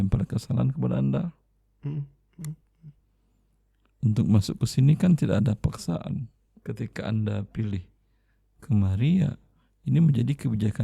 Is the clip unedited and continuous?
no; 1 cut; at 6.5 s

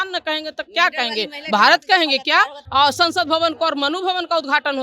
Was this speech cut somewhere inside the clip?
yes; 1 cut; at 2.6 s

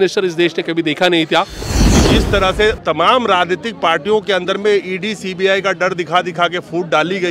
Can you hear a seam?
yes; 1 cut; at 2.0 s

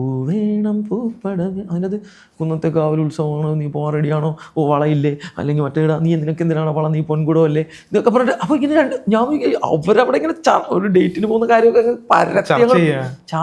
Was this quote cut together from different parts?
no; 0 cuts

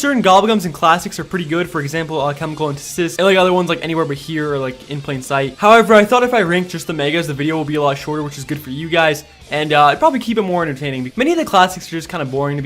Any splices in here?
yes; 1 cut; at 8.1 s

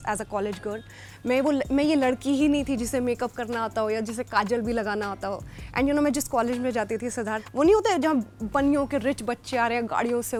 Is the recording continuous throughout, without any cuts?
yes; 0 cuts

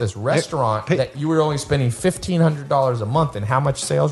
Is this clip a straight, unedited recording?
yes; 0 cuts

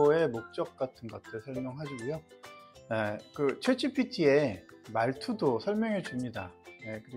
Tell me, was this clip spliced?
no; 0 cuts

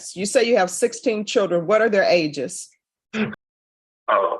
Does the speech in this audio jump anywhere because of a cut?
yes; 1 cut; at 3.4 s

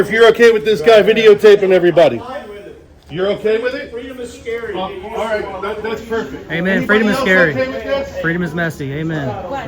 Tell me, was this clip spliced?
no; 0 cuts

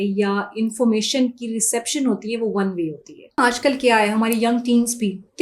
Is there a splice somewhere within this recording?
yes; 1 cut; at 3.4 s

